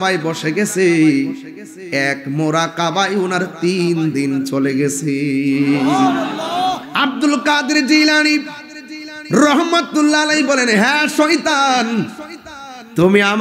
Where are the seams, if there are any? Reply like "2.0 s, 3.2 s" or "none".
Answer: 6.9 s